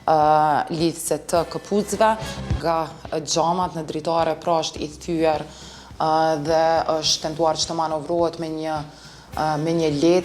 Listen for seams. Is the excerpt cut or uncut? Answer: cut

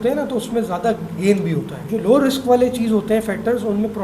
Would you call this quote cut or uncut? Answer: cut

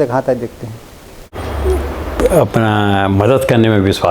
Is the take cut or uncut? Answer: cut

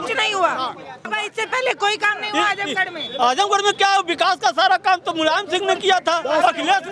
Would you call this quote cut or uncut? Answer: cut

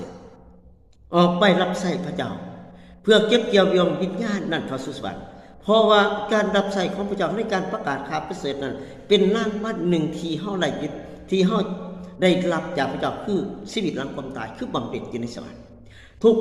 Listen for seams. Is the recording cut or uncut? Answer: cut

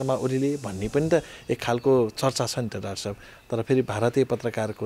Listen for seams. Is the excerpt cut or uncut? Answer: uncut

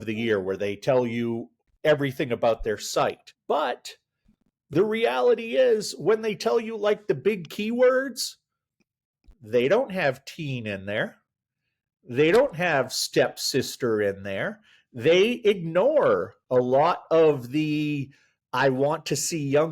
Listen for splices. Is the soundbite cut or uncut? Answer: cut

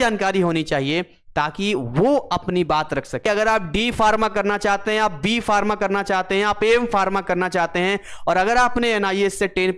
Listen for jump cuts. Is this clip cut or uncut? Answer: cut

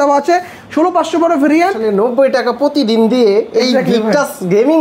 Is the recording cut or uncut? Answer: cut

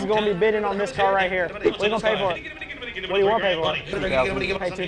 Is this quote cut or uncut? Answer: cut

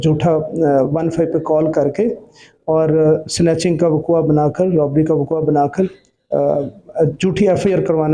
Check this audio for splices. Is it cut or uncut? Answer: uncut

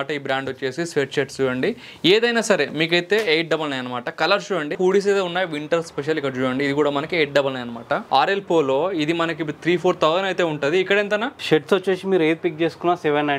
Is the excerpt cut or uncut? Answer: cut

